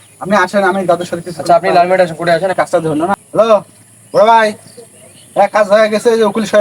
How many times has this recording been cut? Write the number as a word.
one